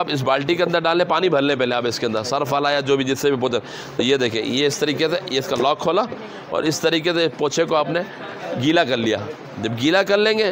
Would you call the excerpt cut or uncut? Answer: uncut